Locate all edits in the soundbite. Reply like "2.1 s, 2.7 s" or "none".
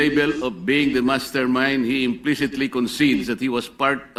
none

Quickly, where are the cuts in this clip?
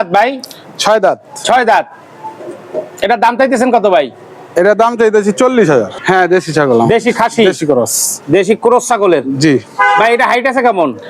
6.0 s

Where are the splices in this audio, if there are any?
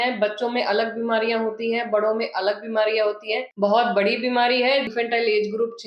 3.4 s, 4.9 s

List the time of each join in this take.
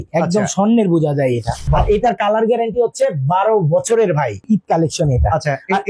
1.6 s, 4.4 s

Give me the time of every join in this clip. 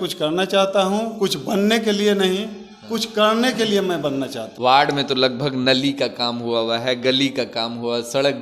4.4 s

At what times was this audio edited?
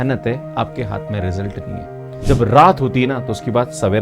2.2 s

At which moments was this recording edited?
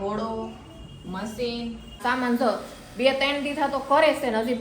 2.0 s

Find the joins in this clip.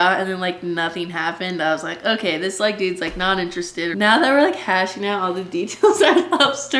3.9 s

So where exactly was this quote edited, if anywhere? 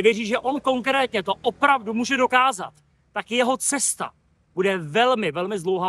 none

